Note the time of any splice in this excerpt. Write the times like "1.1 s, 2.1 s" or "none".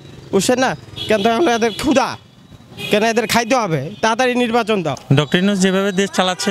5.0 s